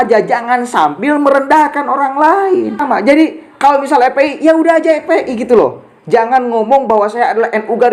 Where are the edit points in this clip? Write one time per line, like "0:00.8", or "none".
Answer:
0:02.8